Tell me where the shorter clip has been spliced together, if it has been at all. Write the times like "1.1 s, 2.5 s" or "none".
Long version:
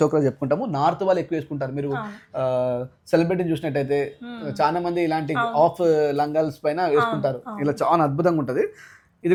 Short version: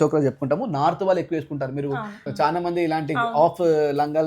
2.2 s